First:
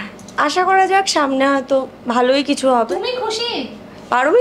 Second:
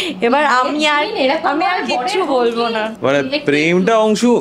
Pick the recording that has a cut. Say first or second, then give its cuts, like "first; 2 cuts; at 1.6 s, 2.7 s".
second; 1 cut; at 2.9 s